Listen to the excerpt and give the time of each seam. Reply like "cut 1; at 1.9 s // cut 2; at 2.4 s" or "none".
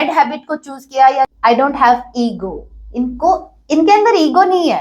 cut 1; at 1.3 s

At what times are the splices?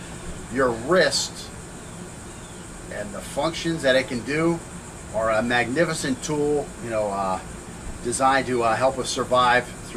cut 1; at 5.3 s

